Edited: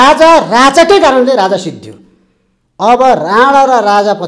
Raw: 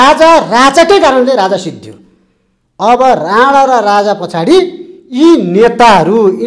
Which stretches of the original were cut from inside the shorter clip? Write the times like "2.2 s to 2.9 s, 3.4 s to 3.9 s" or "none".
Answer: none